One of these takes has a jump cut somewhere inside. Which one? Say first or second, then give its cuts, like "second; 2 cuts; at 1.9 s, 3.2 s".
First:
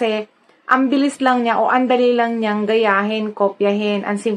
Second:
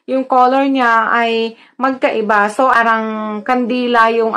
second; 1 cut; at 2.6 s